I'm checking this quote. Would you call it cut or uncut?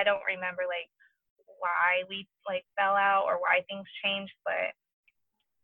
uncut